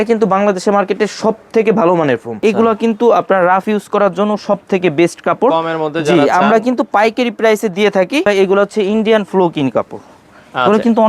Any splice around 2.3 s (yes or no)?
yes